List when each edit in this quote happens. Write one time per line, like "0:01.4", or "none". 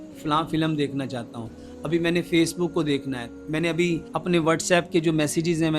0:04.1